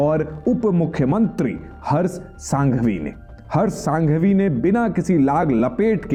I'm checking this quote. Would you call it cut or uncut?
uncut